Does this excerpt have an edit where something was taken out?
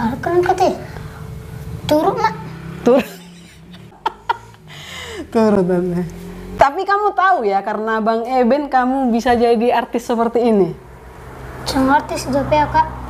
no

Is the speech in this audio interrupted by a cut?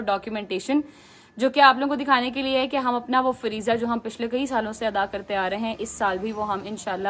no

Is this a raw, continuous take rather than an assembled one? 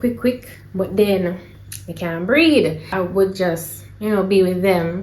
no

